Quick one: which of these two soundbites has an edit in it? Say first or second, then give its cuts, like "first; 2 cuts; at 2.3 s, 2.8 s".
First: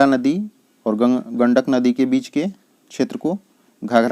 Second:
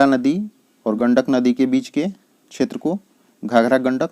second; 1 cut; at 0.9 s